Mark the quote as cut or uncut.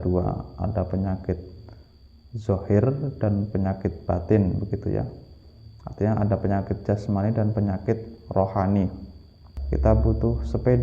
cut